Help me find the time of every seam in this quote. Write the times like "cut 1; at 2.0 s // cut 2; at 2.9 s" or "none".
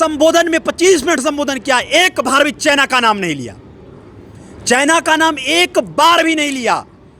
none